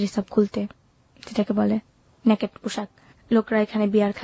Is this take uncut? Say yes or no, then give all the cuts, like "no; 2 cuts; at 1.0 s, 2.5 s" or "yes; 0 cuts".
yes; 0 cuts